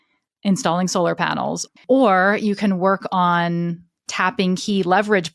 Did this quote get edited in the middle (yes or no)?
yes